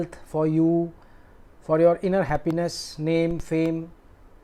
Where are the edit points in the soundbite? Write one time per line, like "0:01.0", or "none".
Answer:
none